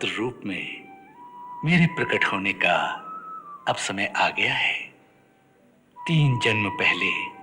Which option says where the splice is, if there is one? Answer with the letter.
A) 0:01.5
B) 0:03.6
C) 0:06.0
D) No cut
C